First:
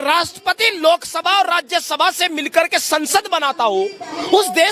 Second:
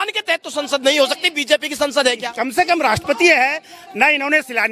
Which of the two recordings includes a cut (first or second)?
second